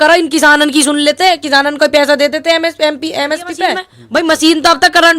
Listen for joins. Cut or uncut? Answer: cut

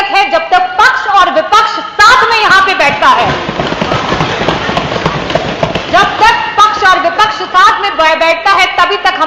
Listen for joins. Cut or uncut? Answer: uncut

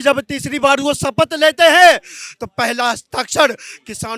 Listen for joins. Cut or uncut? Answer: uncut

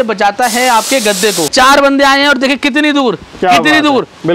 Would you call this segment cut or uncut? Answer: cut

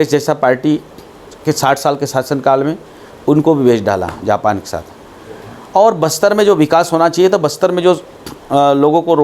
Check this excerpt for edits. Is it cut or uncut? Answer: uncut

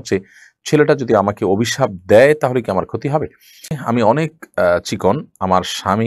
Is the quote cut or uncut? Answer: cut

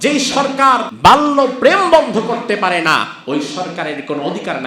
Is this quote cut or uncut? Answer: cut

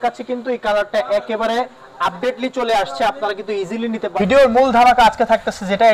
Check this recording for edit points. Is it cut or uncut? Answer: cut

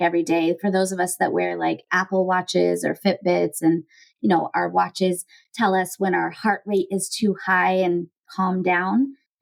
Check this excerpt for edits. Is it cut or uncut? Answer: uncut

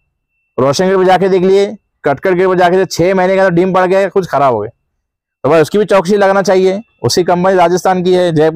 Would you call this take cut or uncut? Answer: uncut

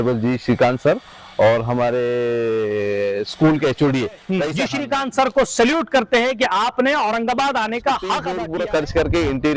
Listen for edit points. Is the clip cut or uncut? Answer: cut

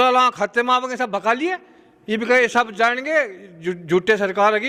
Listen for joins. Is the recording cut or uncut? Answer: uncut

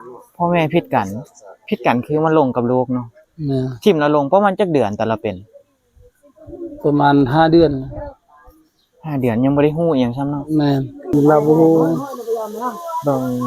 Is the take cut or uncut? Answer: cut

